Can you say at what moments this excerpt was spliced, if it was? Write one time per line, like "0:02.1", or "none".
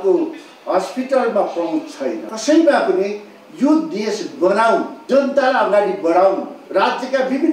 0:02.3
0:04.9
0:06.5

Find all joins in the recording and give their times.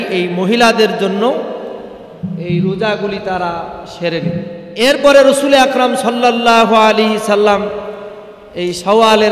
0:04.6

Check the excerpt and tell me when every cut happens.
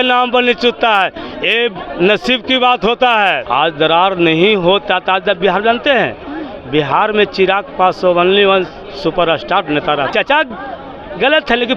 0:03.4
0:10.1

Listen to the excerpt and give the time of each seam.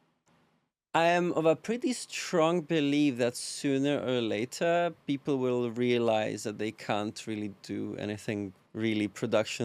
0:08.6

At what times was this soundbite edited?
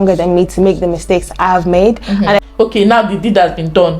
0:02.4

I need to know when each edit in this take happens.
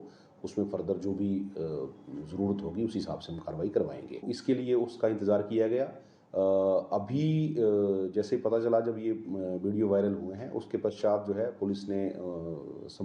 0:04.1

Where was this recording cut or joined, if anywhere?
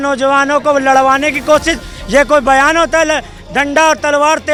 none

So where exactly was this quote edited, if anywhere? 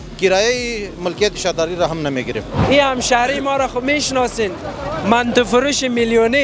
0:02.6

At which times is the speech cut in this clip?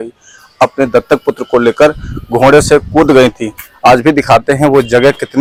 none

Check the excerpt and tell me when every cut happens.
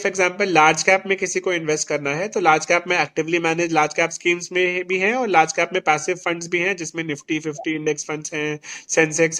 none

